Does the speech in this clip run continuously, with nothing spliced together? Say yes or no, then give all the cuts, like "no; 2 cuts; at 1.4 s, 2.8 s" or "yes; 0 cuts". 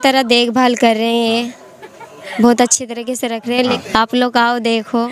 yes; 0 cuts